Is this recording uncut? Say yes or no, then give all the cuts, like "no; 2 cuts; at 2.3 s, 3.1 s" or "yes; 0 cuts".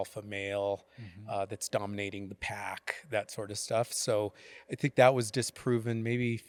yes; 0 cuts